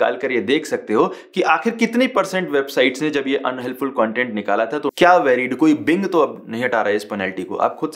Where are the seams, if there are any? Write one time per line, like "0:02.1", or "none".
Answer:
0:04.8